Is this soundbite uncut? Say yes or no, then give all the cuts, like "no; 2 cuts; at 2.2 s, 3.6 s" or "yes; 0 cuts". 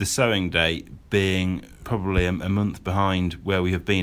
no; 1 cut; at 1.7 s